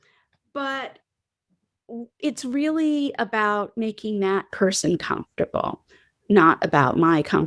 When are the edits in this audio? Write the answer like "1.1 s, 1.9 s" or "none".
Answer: none